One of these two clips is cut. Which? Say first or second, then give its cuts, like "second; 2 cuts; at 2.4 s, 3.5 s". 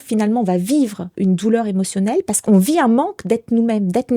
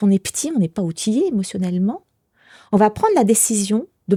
first; 2 cuts; at 1.0 s, 2.4 s